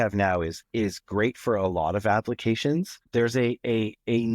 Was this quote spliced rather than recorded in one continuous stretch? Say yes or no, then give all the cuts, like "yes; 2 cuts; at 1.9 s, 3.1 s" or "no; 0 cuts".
yes; 1 cut; at 3.0 s